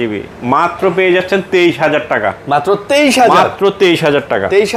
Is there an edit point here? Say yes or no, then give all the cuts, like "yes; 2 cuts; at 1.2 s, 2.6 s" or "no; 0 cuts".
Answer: no; 0 cuts